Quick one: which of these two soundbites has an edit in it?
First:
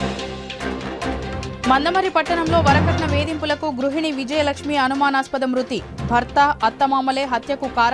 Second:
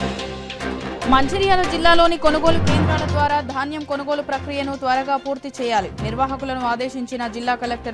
second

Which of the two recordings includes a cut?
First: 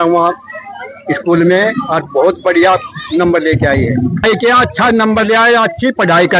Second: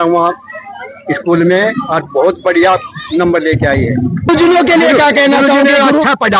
first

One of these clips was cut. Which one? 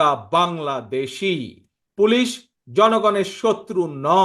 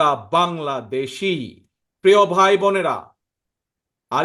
first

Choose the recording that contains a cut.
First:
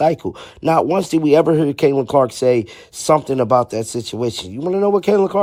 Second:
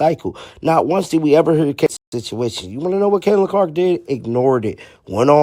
second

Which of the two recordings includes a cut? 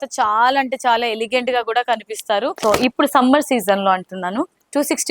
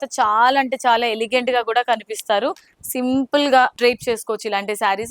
first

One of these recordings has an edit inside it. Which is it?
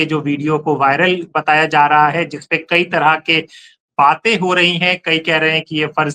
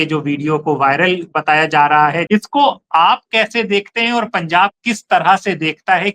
second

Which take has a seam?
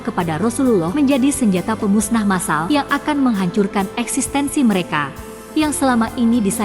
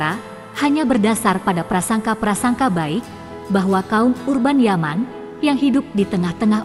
first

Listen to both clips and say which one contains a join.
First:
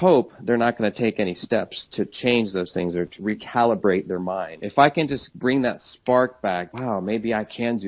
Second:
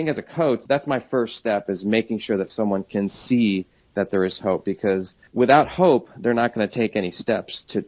first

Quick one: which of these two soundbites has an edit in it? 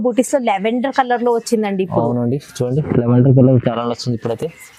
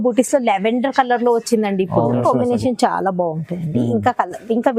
second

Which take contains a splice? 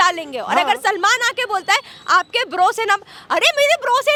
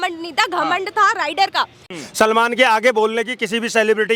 second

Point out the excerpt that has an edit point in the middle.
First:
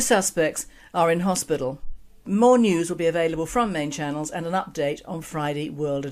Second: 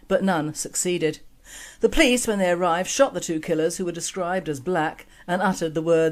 second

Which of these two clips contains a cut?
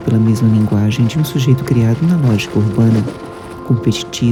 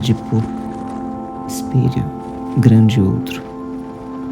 second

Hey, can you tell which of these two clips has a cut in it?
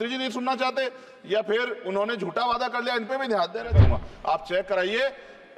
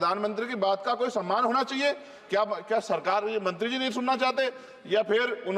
first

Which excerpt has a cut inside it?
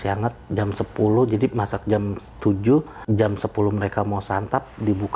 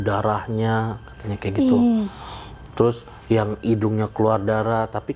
first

